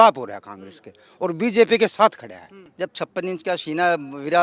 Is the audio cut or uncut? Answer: cut